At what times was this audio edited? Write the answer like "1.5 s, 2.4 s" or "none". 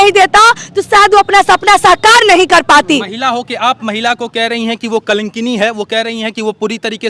none